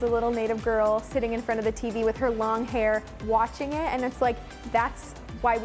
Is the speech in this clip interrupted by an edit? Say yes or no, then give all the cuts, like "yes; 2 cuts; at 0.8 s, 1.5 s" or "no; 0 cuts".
no; 0 cuts